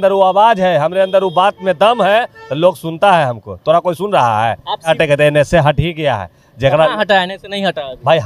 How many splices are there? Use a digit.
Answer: 1